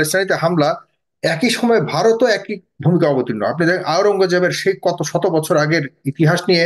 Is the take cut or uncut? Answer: uncut